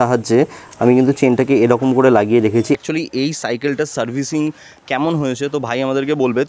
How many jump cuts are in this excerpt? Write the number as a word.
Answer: one